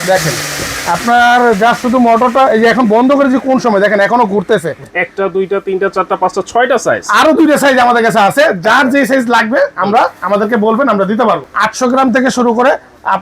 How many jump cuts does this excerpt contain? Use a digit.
2